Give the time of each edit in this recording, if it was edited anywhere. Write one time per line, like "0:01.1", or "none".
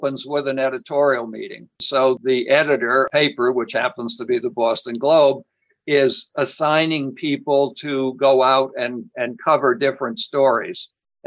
0:02.2